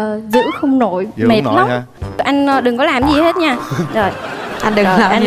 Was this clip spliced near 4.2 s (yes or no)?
no